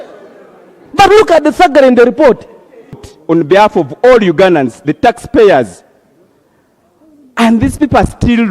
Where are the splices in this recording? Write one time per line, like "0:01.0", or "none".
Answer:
0:03.1